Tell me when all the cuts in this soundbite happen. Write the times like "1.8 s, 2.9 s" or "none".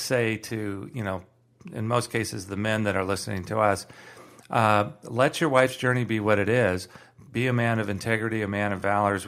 none